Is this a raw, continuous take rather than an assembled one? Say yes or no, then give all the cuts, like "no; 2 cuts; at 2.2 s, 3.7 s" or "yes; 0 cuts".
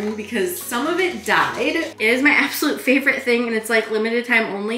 no; 1 cut; at 1.9 s